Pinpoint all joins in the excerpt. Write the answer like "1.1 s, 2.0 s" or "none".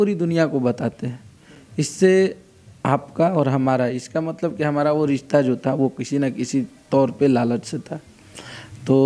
none